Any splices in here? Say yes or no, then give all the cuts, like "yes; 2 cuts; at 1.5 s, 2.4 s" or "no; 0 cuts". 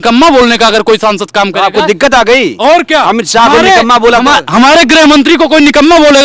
no; 0 cuts